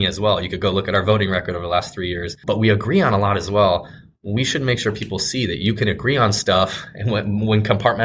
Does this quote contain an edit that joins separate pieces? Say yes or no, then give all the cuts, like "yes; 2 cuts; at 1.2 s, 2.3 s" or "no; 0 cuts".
yes; 1 cut; at 2.3 s